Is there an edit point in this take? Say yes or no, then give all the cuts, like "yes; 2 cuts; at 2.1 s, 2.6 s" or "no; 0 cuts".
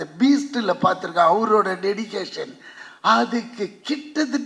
no; 0 cuts